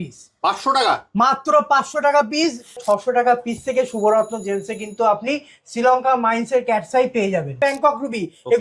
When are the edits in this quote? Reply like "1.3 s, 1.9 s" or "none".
2.8 s, 7.6 s